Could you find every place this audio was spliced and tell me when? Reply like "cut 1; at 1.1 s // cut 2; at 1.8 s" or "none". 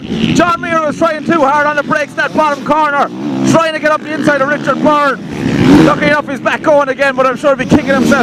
none